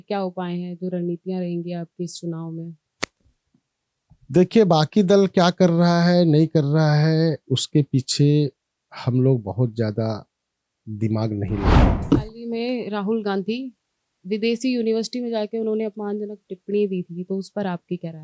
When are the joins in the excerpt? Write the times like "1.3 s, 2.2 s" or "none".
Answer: 11.9 s